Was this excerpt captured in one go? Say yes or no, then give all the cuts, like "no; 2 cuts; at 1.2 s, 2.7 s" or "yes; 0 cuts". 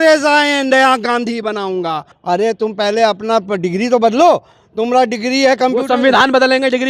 yes; 0 cuts